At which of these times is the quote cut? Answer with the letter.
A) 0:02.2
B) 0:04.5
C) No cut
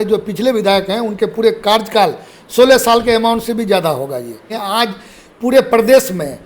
B